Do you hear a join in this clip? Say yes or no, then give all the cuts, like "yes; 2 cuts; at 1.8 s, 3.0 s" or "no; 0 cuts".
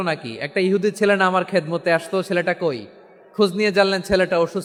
no; 0 cuts